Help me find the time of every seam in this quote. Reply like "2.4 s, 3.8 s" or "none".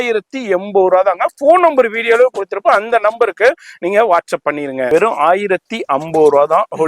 4.9 s